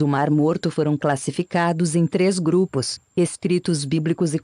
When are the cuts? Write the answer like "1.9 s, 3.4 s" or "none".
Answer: 1.0 s